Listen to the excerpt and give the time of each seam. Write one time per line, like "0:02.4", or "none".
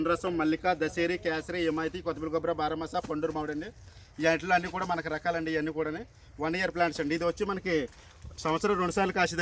none